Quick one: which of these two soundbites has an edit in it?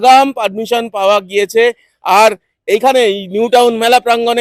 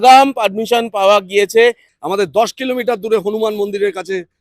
second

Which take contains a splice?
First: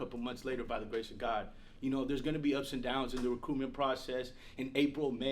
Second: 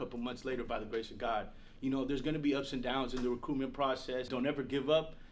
second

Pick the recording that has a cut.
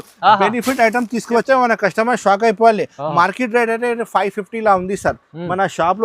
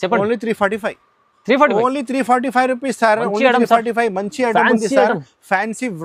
first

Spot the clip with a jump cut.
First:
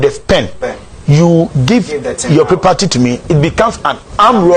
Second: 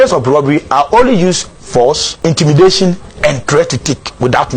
second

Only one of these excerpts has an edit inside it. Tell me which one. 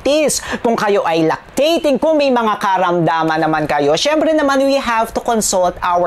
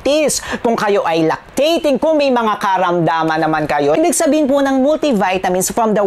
second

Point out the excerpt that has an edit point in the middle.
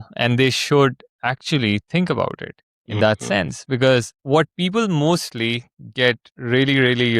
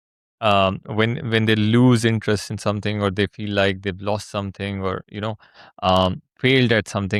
first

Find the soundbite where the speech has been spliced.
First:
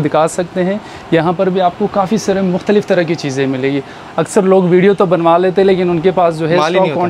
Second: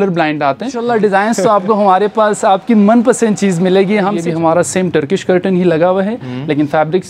second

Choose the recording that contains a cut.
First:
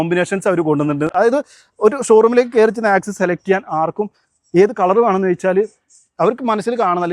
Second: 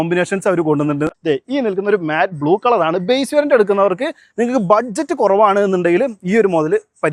second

